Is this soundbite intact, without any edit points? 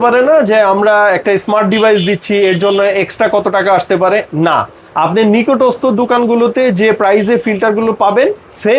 yes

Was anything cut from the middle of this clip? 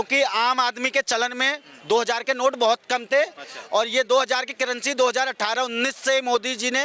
no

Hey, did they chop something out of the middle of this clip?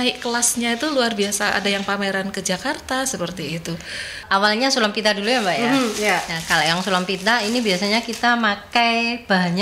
yes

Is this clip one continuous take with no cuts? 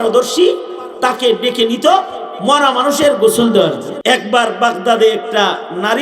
no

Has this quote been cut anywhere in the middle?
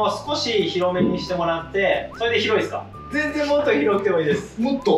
yes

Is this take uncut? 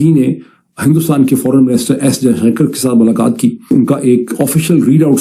no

